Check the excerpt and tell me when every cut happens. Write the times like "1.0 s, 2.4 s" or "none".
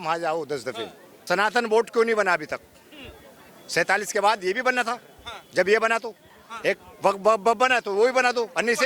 1.2 s